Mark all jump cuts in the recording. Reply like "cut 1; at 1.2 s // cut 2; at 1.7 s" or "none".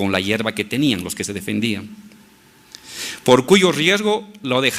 cut 1; at 1.3 s